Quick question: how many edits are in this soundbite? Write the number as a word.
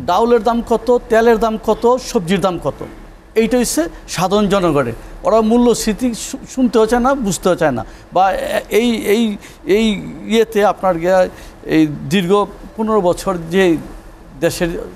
zero